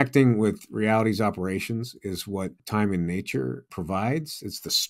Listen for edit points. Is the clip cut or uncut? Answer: cut